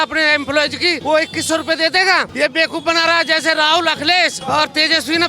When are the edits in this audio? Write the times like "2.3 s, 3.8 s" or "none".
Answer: 1.0 s, 2.3 s, 4.4 s